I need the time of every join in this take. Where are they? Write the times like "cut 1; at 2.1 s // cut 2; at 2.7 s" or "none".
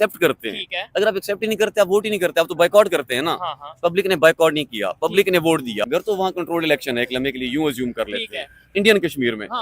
cut 1; at 5.9 s